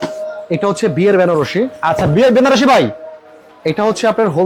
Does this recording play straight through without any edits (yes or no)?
yes